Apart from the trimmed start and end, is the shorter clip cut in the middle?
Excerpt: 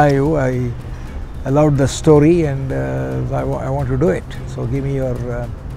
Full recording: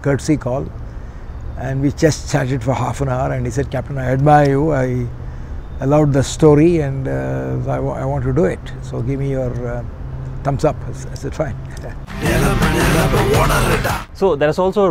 no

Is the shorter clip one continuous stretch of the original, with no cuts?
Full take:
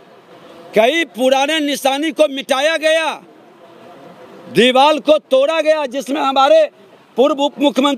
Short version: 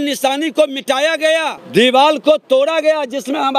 no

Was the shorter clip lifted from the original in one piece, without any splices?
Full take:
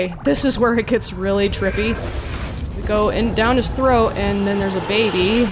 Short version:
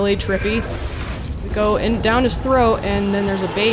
yes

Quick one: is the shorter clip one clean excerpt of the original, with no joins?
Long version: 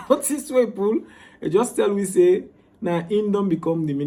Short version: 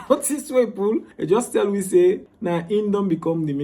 no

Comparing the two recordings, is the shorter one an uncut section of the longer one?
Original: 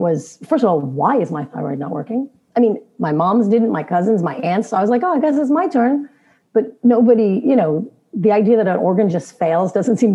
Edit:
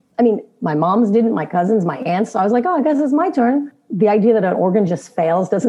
no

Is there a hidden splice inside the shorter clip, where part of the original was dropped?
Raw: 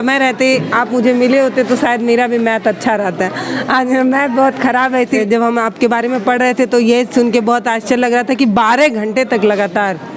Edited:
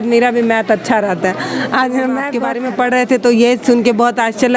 yes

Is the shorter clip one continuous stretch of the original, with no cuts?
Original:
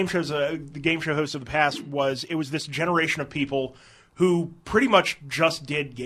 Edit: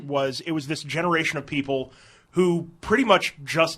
yes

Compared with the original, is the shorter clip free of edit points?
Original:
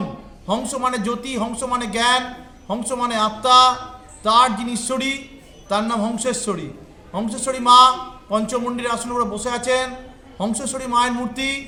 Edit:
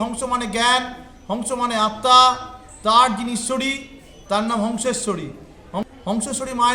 no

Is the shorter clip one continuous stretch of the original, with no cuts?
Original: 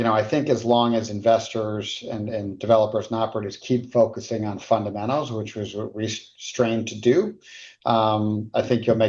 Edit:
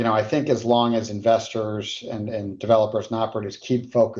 yes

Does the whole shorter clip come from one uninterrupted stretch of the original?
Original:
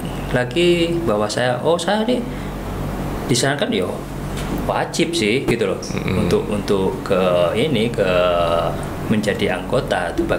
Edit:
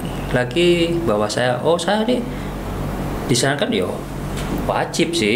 yes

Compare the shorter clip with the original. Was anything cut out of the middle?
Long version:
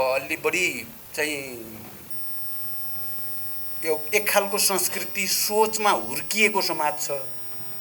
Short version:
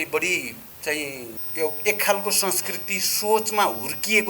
yes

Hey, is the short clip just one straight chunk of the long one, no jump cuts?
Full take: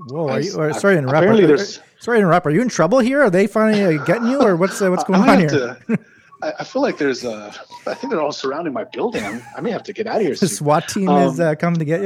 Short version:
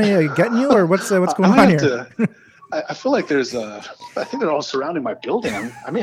yes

